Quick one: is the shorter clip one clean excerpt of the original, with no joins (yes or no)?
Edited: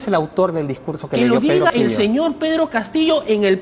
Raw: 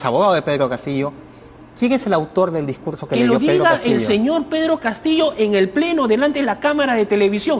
no